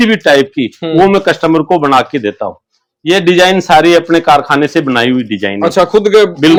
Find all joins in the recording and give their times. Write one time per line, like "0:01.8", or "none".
none